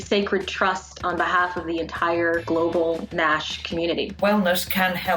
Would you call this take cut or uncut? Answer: cut